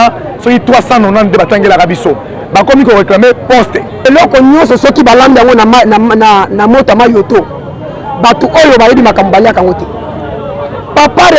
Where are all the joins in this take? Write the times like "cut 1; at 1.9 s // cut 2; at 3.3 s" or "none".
cut 1; at 4.1 s

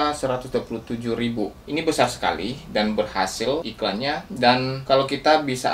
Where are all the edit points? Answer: cut 1; at 1.6 s // cut 2; at 3.6 s // cut 3; at 4.8 s

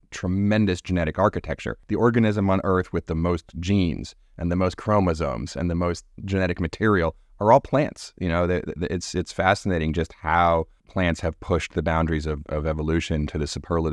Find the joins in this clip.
cut 1; at 1.8 s

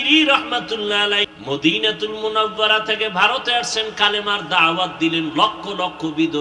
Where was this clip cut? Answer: cut 1; at 1.3 s

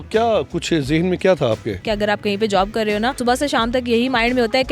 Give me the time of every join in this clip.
cut 1; at 1.8 s // cut 2; at 3.2 s

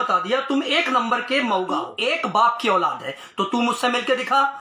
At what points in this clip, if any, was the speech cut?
cut 1; at 1.9 s

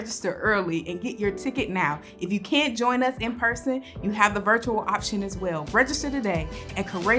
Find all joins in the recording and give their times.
cut 1; at 5.6 s

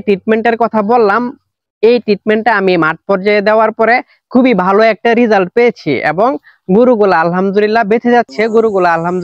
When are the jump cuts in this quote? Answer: none

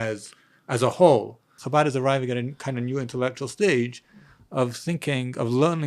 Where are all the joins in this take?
cut 1; at 1.6 s

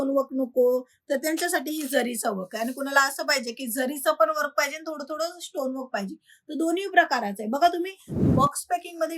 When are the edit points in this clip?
cut 1; at 8.1 s

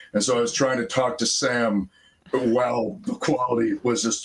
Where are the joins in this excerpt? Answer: none

